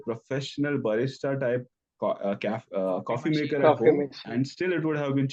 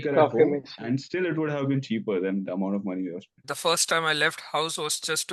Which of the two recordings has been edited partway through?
second; 1 cut; at 3.3 s

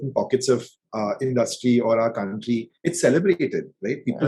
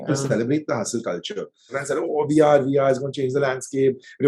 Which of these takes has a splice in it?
second; 1 cut; at 1.8 s

